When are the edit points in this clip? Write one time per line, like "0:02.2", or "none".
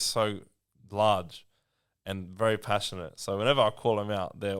none